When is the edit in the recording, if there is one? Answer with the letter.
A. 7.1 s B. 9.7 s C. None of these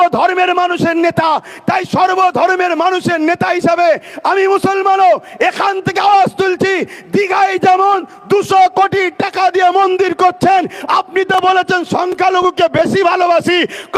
C